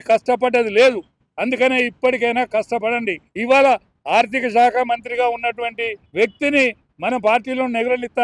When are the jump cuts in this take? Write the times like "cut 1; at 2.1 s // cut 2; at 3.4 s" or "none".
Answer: cut 1; at 3.3 s // cut 2; at 6.0 s